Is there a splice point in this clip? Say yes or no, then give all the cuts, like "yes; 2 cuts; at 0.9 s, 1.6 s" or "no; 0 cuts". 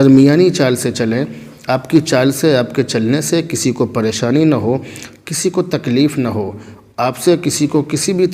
no; 0 cuts